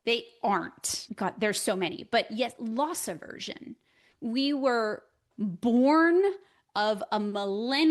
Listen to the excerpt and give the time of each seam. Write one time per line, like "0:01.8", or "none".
0:01.1
0:04.1
0:05.3